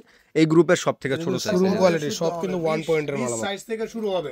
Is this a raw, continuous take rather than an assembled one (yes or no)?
no